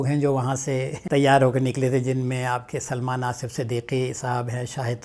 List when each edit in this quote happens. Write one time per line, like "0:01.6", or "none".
0:00.9